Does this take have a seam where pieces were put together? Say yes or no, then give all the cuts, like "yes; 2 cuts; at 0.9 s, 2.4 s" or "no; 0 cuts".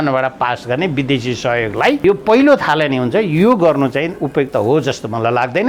yes; 1 cut; at 2.0 s